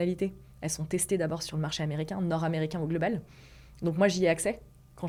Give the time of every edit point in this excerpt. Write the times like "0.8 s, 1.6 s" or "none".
none